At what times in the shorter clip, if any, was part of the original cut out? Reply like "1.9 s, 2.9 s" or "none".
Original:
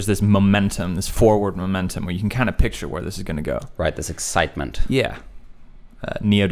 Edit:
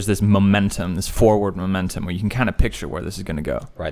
none

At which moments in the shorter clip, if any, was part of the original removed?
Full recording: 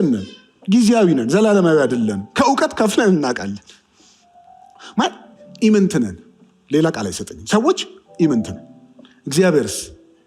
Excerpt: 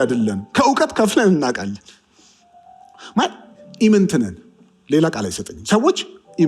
none

